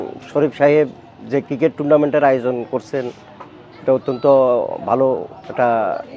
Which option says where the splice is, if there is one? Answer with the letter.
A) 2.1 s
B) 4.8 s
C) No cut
C